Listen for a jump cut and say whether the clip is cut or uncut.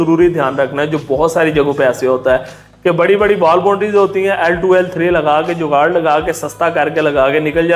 uncut